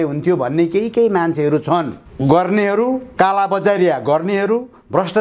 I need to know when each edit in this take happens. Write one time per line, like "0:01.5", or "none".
0:02.0